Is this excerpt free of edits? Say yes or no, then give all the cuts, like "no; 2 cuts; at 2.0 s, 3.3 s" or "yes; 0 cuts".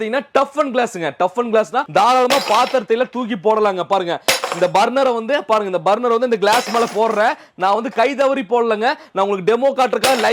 no; 1 cut; at 1.8 s